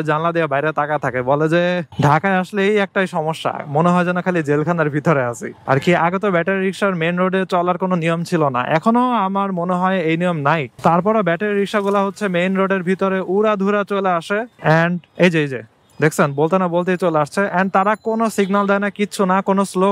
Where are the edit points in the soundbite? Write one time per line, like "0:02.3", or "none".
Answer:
0:01.9
0:05.5